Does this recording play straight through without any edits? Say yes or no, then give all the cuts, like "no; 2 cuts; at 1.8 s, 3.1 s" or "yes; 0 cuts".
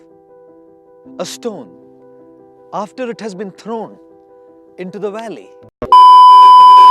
no; 1 cut; at 5.6 s